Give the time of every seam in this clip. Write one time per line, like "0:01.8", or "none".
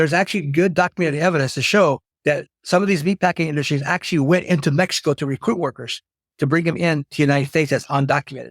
0:02.1